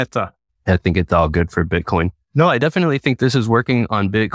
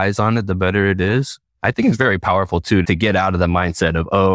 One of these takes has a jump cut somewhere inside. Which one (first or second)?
second